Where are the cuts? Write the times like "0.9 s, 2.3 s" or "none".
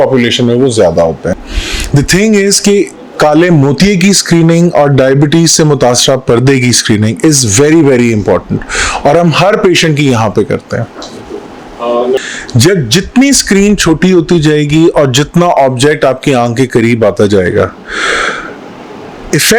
1.4 s, 12.2 s